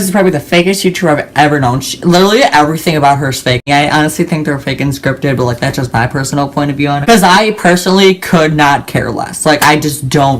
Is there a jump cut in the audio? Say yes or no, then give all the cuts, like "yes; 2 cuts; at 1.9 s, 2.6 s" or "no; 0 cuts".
yes; 2 cuts; at 3.6 s, 7.0 s